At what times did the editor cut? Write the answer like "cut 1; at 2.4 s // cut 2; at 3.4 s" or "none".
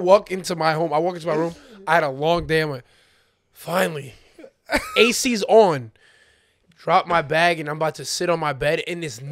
none

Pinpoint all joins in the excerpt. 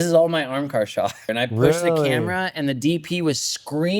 cut 1; at 1.3 s

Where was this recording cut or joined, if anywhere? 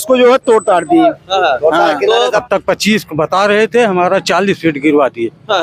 cut 1; at 2.4 s

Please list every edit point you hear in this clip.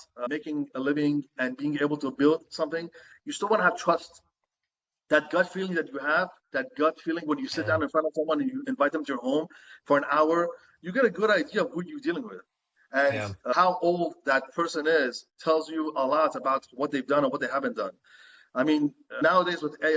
none

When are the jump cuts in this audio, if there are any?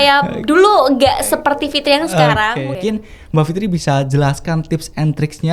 cut 1; at 2.5 s

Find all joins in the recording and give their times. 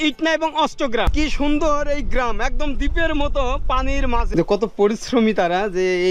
cut 1; at 1.1 s // cut 2; at 4.3 s

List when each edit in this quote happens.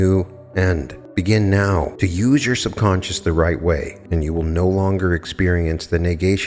cut 1; at 0.9 s // cut 2; at 1.9 s // cut 3; at 4.0 s

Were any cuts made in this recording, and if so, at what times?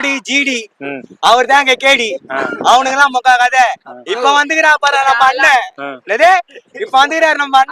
none

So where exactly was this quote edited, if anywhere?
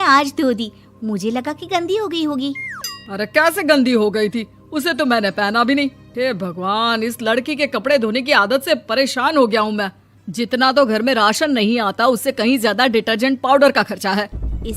cut 1; at 3.2 s

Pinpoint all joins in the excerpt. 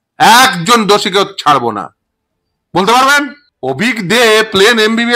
cut 1; at 3.4 s

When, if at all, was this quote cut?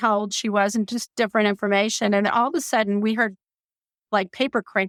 none

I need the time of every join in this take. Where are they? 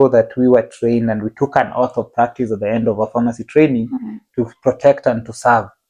none

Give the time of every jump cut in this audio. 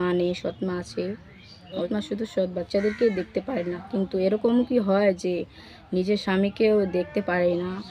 cut 1; at 1.8 s

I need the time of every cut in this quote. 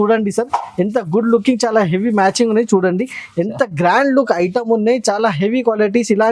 none

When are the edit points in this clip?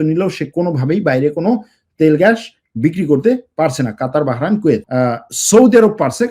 cut 1; at 4.9 s

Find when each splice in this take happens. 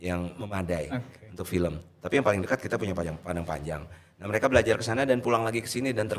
none

